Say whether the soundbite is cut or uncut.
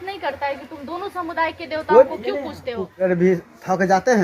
cut